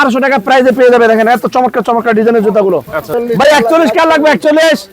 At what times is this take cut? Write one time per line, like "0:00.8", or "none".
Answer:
0:03.0

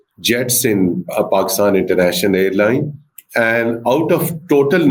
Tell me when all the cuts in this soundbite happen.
none

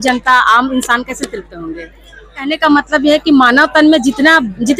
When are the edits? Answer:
0:02.5

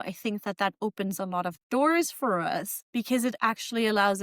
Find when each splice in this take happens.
0:02.8

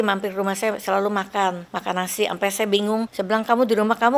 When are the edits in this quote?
0:01.7
0:03.1

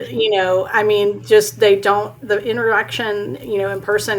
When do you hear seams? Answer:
0:02.2

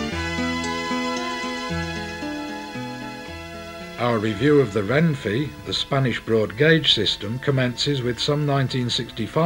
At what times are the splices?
none

